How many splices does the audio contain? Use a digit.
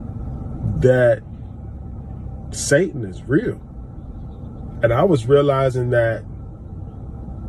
0